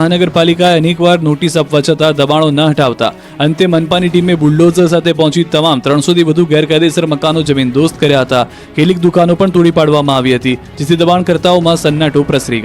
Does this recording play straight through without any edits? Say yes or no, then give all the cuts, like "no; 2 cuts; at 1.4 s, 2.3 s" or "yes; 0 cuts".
no; 1 cut; at 11.6 s